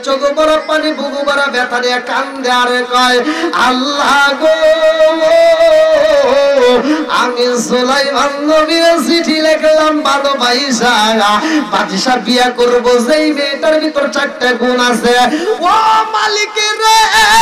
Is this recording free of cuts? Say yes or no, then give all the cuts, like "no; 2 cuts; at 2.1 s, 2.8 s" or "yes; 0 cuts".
yes; 0 cuts